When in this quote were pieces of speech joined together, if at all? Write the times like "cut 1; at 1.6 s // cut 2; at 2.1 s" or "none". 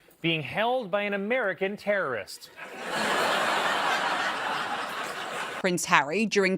cut 1; at 5.5 s

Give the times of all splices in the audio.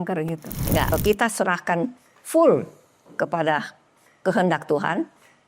cut 1; at 0.9 s

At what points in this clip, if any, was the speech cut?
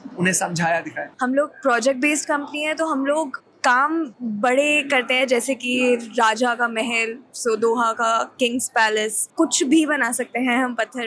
cut 1; at 1.0 s // cut 2; at 9.2 s

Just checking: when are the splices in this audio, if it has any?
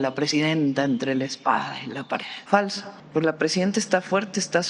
cut 1; at 2.3 s // cut 2; at 2.9 s

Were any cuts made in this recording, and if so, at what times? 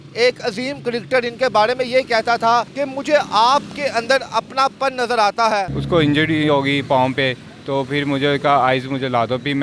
cut 1; at 2.8 s // cut 2; at 5.8 s

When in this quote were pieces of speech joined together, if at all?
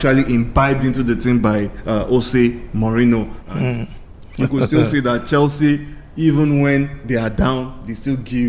none

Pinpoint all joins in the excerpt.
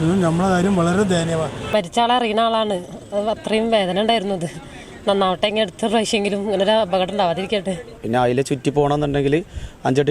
cut 1; at 1.6 s // cut 2; at 7.9 s

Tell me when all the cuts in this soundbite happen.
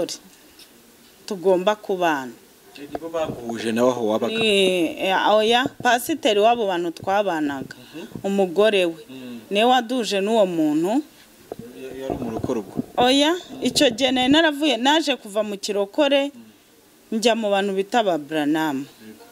none

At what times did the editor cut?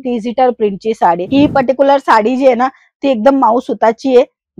cut 1; at 1.3 s

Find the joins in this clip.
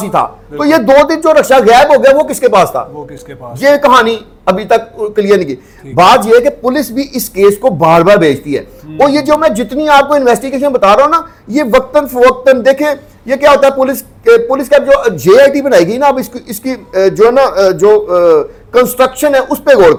none

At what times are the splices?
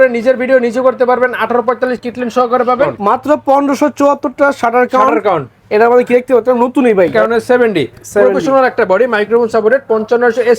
cut 1; at 3.0 s // cut 2; at 7.1 s

